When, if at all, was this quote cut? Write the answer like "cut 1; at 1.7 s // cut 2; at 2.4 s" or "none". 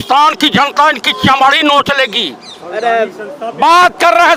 none